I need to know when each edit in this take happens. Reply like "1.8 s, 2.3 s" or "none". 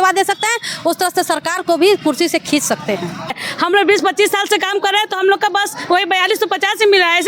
3.3 s